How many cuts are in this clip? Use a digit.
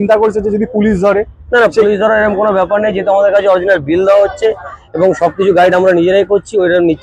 0